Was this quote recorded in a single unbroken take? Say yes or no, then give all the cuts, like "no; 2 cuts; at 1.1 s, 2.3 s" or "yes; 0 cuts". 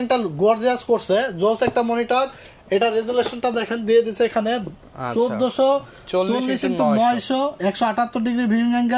yes; 0 cuts